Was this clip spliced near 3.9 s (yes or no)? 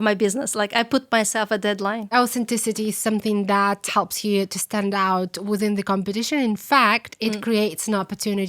yes